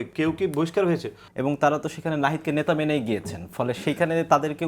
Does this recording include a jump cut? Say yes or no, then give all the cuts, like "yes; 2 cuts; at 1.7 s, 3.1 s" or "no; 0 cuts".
yes; 1 cut; at 1.2 s